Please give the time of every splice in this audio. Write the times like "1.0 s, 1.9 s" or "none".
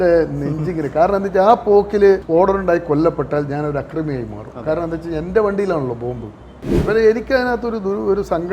2.2 s, 6.8 s